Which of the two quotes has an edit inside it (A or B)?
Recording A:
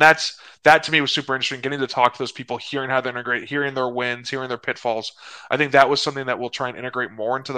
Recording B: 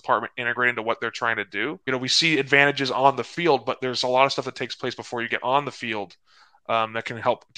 B